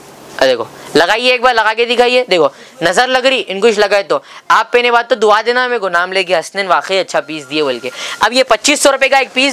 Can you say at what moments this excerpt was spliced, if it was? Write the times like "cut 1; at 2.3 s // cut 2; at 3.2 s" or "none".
none